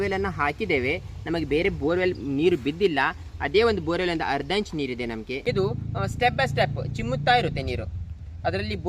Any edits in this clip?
yes; 1 cut; at 5.4 s

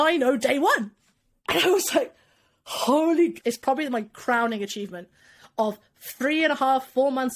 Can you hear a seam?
yes; 1 cut; at 3.4 s

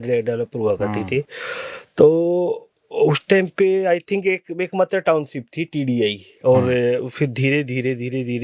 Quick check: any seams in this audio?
no; 0 cuts

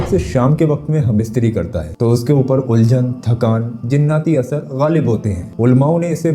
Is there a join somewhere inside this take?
no; 0 cuts

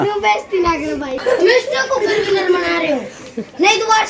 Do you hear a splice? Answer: yes; 1 cut; at 1.2 s

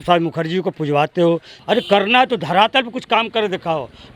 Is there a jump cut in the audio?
yes; 1 cut; at 1.5 s

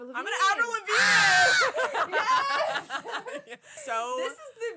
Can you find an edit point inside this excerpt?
yes; 1 cut; at 3.7 s

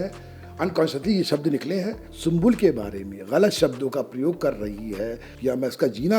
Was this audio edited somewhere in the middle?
yes; 2 cuts; at 2.0 s, 5.3 s

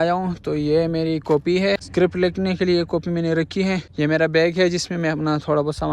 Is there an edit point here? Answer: yes; 1 cut; at 1.8 s

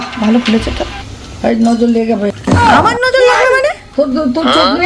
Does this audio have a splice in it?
no; 0 cuts

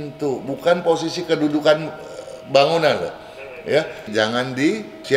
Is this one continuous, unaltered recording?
no; 1 cut; at 4.0 s

